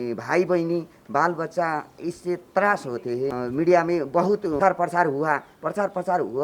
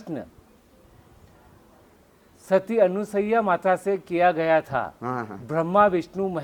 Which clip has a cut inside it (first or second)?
first